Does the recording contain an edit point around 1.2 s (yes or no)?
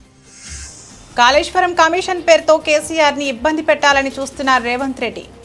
yes